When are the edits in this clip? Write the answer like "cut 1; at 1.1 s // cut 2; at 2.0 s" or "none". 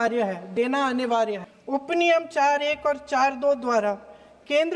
cut 1; at 1.5 s